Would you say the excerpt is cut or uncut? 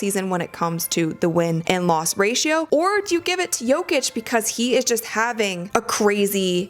cut